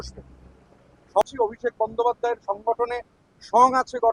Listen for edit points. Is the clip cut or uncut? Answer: cut